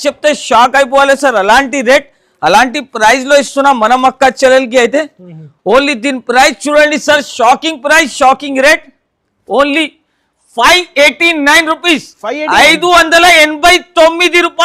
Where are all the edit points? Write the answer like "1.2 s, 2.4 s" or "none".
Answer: none